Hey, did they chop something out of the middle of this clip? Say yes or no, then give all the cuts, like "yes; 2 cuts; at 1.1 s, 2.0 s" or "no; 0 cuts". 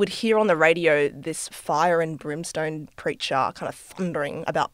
no; 0 cuts